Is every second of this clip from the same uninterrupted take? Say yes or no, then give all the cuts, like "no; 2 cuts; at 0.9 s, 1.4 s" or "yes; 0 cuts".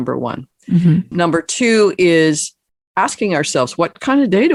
yes; 0 cuts